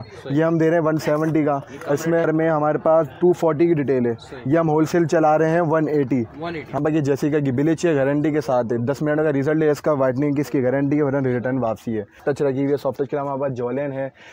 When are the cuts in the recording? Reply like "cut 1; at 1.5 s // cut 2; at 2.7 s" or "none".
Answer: cut 1; at 2.3 s // cut 2; at 6.8 s // cut 3; at 12.2 s